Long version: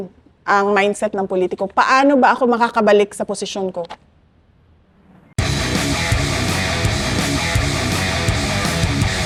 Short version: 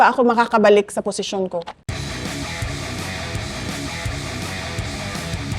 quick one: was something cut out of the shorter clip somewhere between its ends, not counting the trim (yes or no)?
yes